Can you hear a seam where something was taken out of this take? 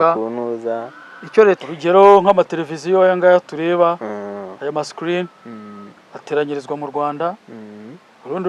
yes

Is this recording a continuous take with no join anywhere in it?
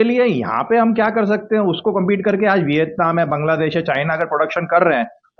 yes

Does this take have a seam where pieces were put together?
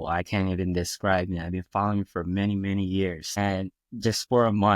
yes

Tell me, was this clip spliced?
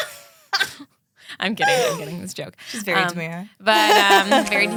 no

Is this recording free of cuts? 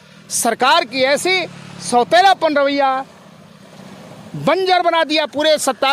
yes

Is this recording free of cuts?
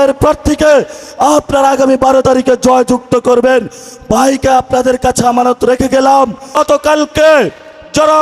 no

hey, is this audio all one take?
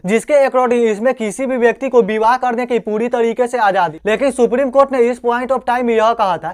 no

